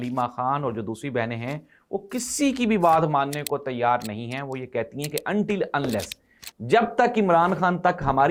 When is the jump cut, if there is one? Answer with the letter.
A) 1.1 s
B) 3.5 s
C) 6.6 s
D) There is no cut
D